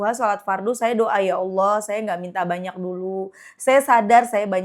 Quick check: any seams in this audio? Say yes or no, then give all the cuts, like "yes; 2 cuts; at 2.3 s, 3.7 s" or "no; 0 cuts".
no; 0 cuts